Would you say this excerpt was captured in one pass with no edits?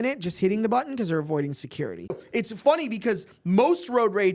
no; 1 cut; at 2.2 s

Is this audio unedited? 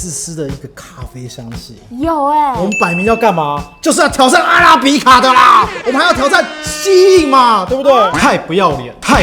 yes; 0 cuts

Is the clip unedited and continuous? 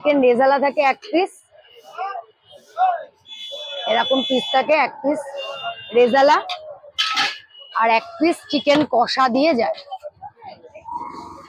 yes; 0 cuts

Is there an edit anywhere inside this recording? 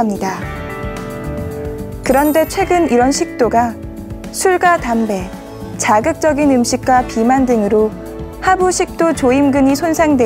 yes; 1 cut; at 1.4 s

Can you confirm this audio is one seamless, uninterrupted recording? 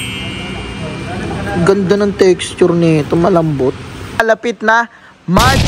no; 1 cut; at 4.2 s

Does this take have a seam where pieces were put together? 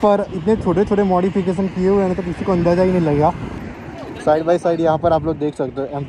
yes; 1 cut; at 3.6 s

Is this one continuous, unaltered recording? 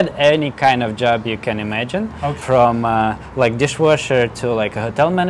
yes; 0 cuts

